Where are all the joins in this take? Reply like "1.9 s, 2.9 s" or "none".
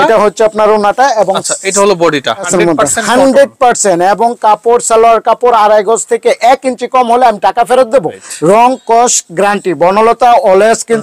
2.5 s, 8.2 s